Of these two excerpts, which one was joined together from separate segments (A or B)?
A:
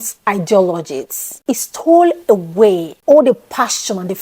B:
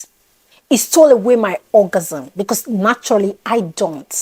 A